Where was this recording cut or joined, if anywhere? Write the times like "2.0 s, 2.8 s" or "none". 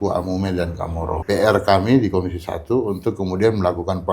1.1 s